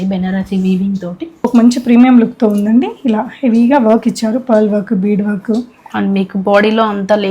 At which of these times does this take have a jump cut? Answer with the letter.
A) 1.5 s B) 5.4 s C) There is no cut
A